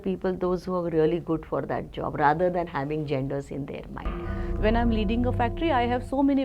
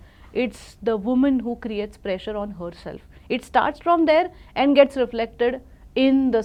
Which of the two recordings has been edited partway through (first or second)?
first